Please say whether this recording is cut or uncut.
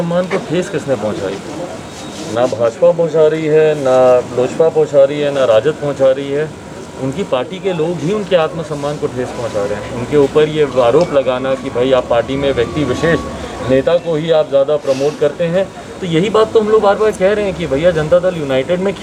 uncut